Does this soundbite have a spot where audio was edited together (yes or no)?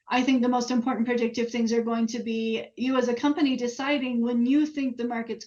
no